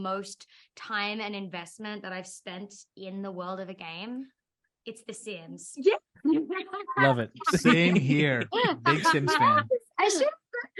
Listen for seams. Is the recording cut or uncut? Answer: uncut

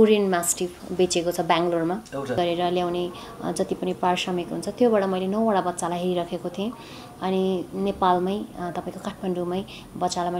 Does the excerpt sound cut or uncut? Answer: cut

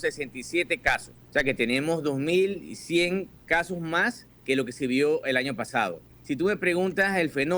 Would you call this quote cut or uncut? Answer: cut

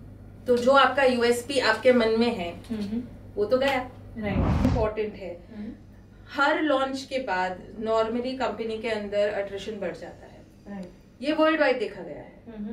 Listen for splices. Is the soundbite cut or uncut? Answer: cut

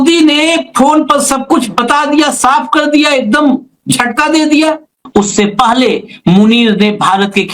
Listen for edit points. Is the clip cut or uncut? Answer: cut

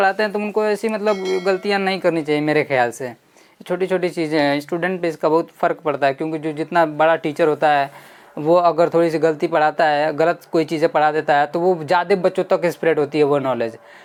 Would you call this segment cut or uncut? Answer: uncut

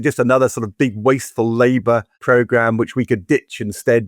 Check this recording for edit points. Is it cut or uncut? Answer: cut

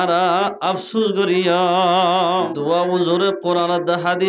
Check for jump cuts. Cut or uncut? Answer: cut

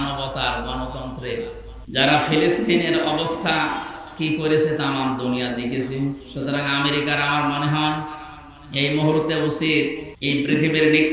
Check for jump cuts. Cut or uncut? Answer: cut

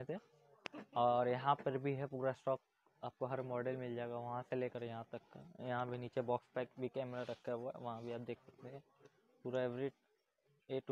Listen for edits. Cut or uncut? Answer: uncut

